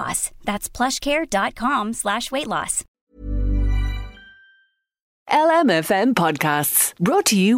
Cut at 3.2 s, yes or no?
no